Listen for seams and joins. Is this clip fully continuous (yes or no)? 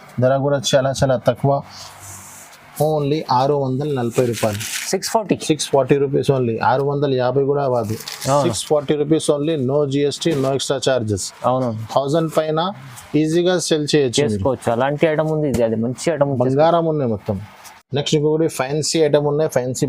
yes